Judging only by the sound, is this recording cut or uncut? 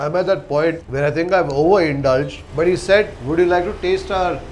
uncut